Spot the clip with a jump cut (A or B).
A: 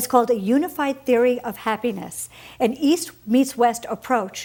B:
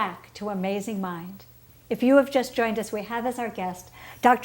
B